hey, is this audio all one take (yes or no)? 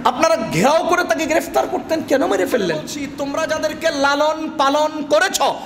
no